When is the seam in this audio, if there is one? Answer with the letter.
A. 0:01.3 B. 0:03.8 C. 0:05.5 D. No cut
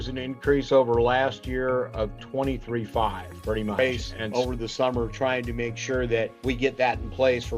B